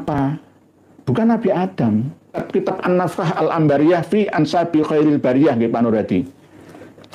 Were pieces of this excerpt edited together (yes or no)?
yes